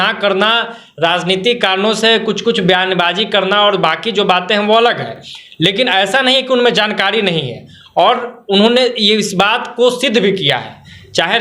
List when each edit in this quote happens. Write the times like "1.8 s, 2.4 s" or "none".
none